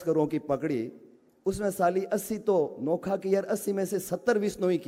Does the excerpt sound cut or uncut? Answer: uncut